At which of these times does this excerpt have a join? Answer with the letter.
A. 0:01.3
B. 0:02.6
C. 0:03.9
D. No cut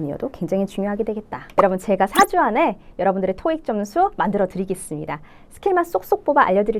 A